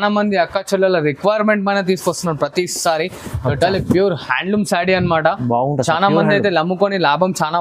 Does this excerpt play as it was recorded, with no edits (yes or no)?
yes